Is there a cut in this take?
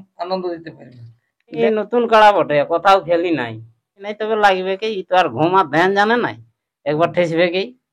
yes; 2 cuts; at 1.6 s, 4.1 s

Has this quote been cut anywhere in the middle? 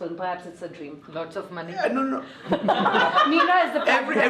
yes; 1 cut; at 1.0 s

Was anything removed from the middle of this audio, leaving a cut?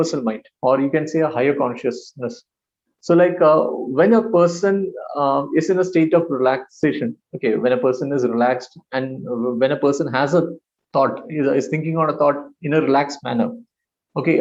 no; 0 cuts

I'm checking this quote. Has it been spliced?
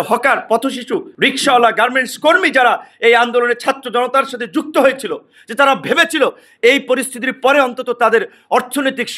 yes; 1 cut; at 1.1 s

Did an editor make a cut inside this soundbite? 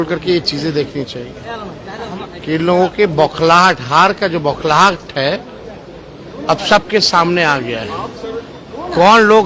no; 0 cuts

